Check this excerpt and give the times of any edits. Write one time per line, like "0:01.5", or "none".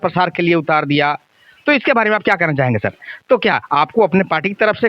0:03.1